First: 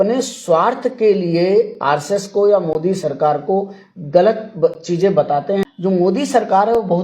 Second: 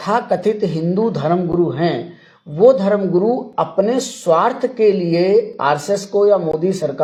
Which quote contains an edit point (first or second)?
first